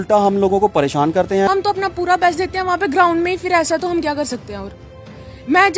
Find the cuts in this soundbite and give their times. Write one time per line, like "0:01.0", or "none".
0:01.5